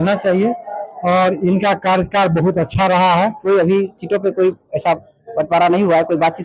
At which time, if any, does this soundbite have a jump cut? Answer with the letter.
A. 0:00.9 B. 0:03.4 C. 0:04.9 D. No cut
B